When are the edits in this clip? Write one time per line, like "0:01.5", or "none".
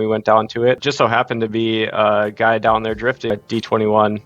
0:00.8
0:03.3